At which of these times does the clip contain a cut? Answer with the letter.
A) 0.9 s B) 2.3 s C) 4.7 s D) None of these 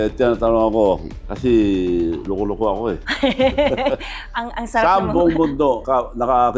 D